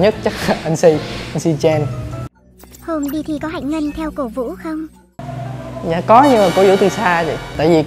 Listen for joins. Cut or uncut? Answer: cut